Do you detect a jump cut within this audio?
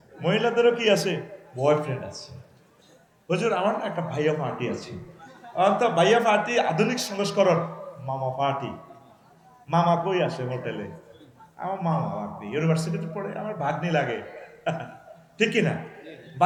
no; 0 cuts

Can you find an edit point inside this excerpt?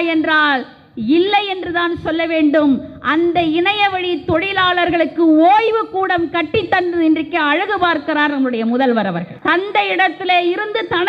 yes; 1 cut; at 9.3 s

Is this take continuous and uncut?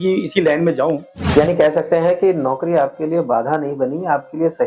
no; 1 cut; at 1.1 s

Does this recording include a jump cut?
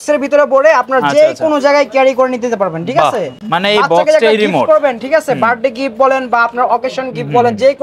no; 0 cuts

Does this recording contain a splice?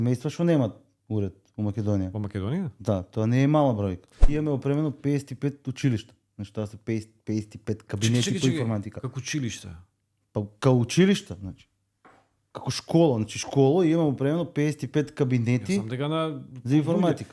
yes; 1 cut; at 4.1 s

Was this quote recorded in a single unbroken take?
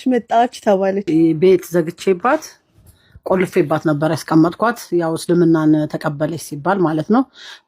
no; 1 cut; at 1.0 s

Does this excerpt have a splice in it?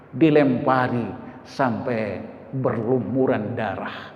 no; 0 cuts

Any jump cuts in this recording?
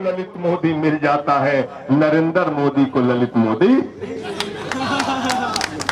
no; 0 cuts

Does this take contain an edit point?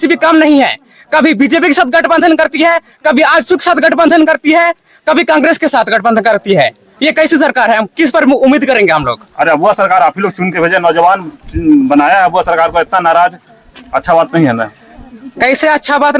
no; 0 cuts

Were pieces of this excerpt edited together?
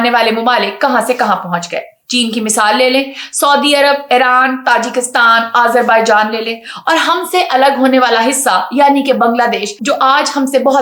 no; 0 cuts

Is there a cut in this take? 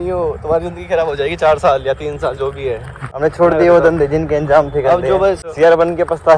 yes; 2 cuts; at 3.1 s, 5.4 s

